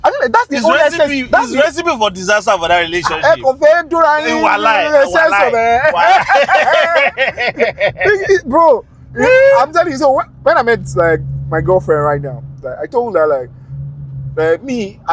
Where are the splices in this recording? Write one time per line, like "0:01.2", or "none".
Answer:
none